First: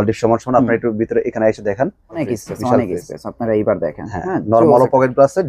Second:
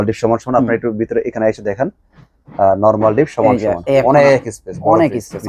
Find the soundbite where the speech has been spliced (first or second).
first